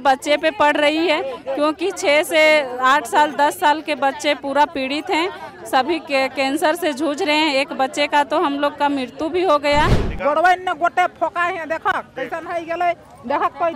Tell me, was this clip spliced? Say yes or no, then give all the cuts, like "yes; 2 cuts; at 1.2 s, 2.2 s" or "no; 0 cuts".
yes; 1 cut; at 10.0 s